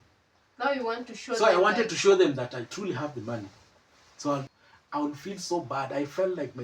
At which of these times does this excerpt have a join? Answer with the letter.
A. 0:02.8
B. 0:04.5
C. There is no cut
B